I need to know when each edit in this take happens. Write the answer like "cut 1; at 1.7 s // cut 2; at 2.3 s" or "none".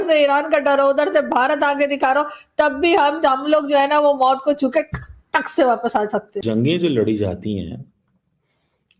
cut 1; at 6.3 s